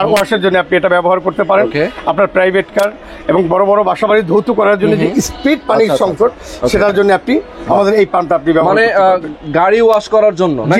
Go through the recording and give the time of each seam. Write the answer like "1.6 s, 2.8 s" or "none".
none